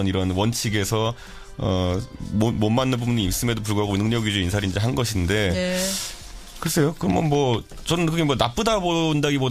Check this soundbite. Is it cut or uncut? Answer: cut